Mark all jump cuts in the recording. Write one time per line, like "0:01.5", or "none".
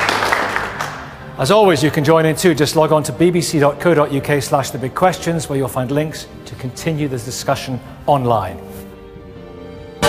none